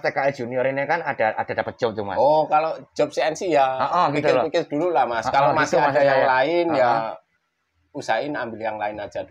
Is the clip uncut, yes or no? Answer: yes